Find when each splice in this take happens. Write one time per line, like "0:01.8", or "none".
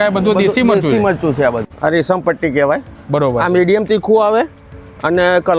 0:01.7